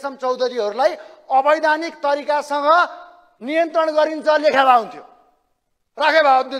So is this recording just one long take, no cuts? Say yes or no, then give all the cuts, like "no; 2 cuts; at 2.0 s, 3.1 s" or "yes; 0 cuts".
yes; 0 cuts